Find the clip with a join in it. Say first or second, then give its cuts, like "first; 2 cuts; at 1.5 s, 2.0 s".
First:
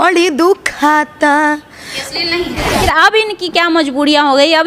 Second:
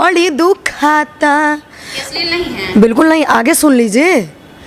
first; 1 cut; at 2.7 s